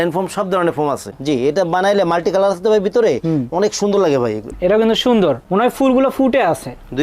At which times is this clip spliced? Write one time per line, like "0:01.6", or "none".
0:01.1
0:04.5